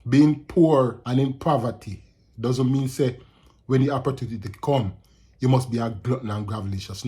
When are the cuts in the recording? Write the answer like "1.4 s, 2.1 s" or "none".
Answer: 1.0 s

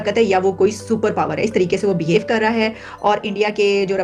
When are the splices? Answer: none

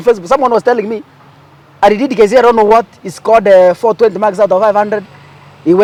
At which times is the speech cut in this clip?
none

